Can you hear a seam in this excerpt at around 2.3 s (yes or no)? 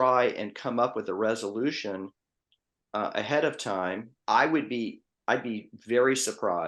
no